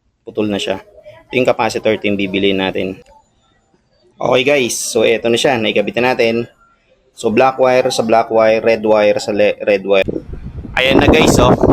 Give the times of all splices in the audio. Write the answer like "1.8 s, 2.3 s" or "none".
3.0 s, 10.0 s